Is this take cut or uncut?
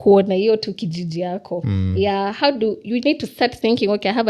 uncut